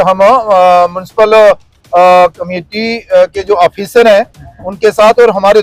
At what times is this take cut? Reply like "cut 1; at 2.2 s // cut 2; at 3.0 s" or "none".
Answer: none